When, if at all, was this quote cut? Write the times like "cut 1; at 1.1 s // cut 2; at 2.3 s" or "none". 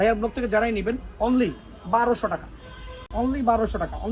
none